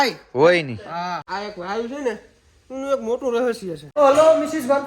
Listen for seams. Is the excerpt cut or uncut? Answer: cut